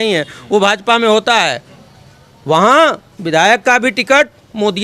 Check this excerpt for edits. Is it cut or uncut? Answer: uncut